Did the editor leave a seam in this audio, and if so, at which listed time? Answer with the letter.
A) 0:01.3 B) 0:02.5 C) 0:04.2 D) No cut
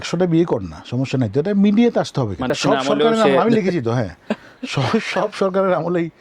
B